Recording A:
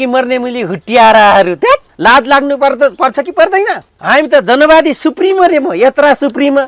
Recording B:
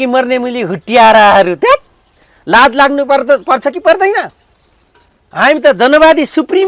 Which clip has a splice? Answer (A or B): A